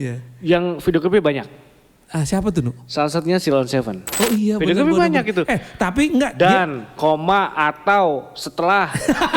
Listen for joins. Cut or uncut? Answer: cut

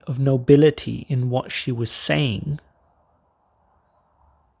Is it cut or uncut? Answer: uncut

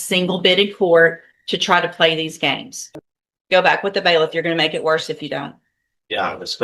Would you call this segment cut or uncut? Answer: cut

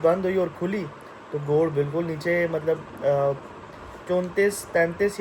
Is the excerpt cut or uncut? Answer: uncut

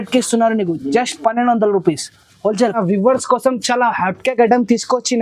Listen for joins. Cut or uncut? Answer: cut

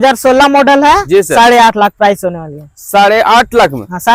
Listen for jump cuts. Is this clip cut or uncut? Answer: uncut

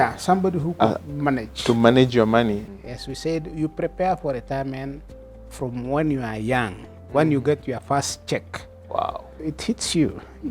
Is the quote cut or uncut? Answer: cut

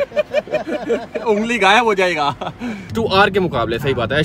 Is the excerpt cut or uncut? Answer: cut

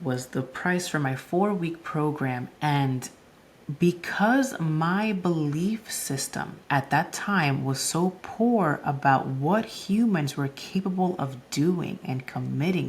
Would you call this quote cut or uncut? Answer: cut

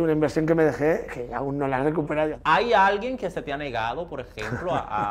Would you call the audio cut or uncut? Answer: cut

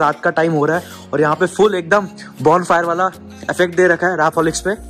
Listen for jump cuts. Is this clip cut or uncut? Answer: uncut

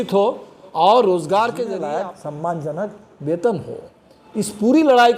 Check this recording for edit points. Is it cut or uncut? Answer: cut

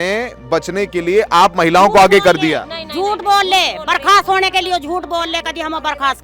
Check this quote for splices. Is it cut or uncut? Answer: uncut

